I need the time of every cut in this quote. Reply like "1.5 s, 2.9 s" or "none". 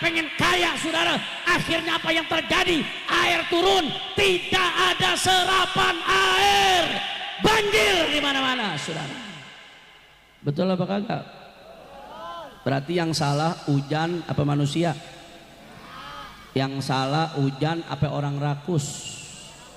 none